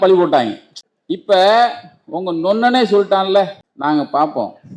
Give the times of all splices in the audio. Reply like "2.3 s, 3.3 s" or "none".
3.7 s